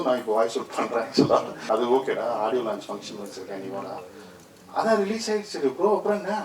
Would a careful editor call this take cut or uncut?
cut